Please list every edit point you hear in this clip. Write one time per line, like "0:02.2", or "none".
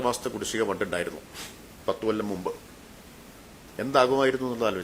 none